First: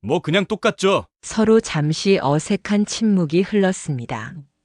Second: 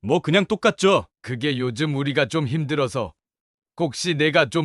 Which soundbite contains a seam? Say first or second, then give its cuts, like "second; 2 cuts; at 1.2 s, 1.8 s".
second; 1 cut; at 1.2 s